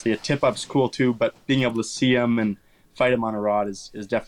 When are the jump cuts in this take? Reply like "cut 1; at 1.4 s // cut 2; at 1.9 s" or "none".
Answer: none